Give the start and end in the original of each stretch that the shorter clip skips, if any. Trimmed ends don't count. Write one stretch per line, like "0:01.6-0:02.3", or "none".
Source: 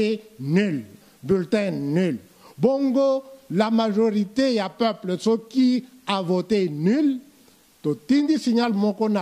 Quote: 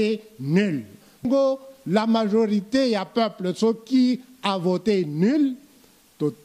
0:01.3-0:02.9